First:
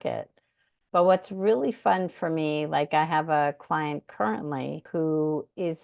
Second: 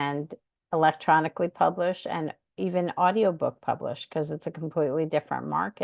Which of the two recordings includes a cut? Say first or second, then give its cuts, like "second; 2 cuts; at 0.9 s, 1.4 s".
first; 1 cut; at 4.9 s